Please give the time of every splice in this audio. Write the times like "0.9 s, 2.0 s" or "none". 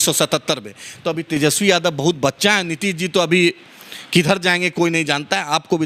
none